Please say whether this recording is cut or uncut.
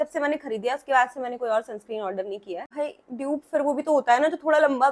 cut